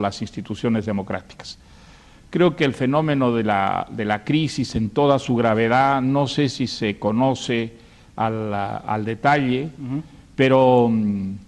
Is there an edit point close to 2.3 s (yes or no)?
no